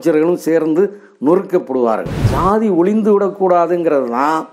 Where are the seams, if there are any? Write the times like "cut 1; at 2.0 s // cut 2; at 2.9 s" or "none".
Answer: cut 1; at 2.3 s